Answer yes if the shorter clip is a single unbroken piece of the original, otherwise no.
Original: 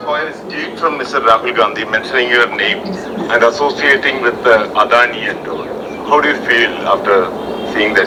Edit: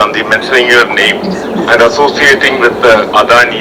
yes